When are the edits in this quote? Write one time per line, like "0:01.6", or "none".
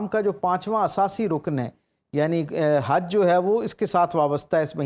none